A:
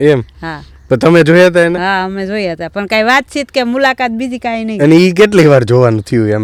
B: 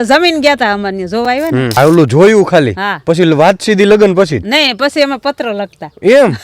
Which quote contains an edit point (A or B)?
B